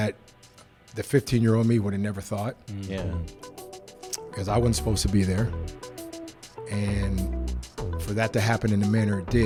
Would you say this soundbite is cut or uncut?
uncut